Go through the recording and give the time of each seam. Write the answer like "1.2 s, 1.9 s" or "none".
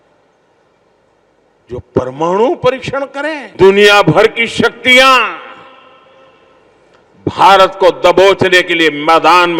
3.4 s